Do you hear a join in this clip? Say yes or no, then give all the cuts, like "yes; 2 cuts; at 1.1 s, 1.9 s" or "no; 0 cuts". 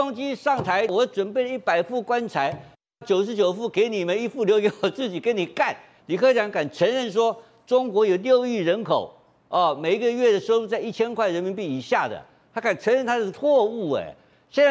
yes; 3 cuts; at 0.9 s, 5.9 s, 13.3 s